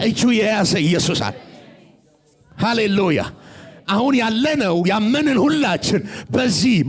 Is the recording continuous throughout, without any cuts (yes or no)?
yes